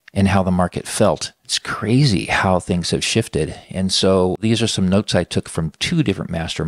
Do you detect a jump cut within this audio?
yes; 2 cuts; at 1.6 s, 4.4 s

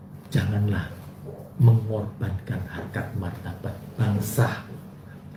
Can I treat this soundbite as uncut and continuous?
yes; 0 cuts

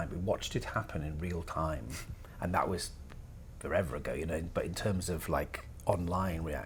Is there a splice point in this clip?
no; 0 cuts

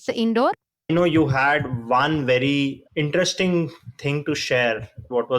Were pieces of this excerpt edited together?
yes; 1 cut; at 0.9 s

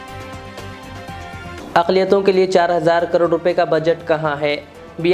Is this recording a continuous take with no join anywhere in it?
no; 1 cut; at 1.6 s

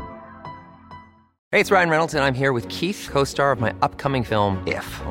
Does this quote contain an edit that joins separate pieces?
yes; 1 cut; at 1.3 s

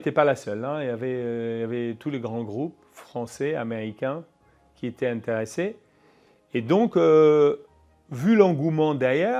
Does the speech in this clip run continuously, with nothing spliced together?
yes; 0 cuts

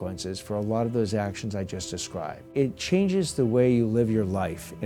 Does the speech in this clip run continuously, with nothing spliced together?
no; 1 cut; at 2.5 s

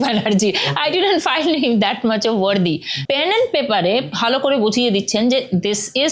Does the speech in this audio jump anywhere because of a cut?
yes; 2 cuts; at 2.9 s, 4.1 s

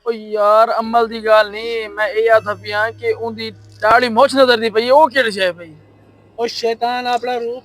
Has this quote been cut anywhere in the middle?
no; 0 cuts

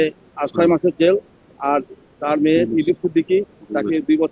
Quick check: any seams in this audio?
no; 0 cuts

